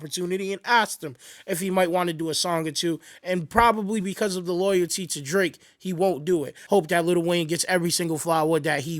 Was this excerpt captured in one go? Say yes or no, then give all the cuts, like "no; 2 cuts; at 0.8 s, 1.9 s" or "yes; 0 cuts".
no; 1 cut; at 6.5 s